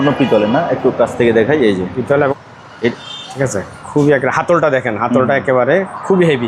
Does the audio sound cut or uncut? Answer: cut